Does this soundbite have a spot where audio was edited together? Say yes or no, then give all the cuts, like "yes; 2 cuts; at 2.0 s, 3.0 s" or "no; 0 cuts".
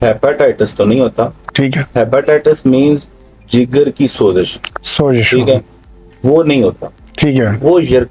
no; 0 cuts